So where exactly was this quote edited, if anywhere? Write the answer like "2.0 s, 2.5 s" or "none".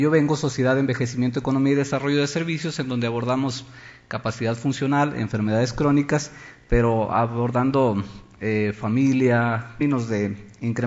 none